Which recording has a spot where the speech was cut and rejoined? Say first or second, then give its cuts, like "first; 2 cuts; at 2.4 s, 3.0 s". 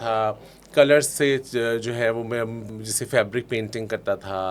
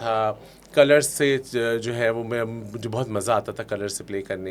first; 1 cut; at 2.7 s